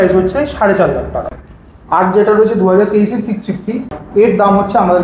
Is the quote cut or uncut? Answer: cut